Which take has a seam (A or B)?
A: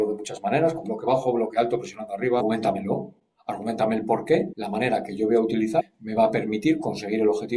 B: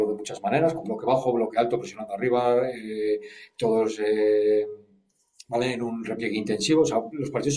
A